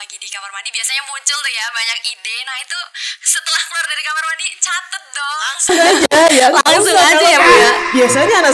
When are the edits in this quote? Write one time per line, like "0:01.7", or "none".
none